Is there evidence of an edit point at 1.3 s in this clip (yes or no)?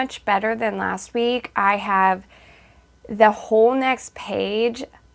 no